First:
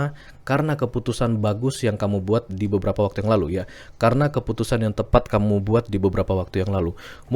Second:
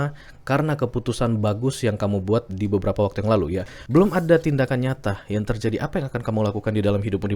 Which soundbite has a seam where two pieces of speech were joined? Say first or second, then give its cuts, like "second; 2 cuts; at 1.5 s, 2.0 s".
second; 1 cut; at 3.7 s